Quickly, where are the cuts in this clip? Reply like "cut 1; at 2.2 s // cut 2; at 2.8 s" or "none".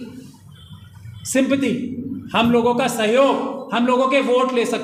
none